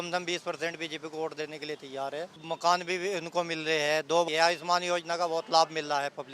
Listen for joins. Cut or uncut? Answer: cut